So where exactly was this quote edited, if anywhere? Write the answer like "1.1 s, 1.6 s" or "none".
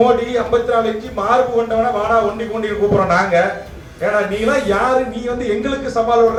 none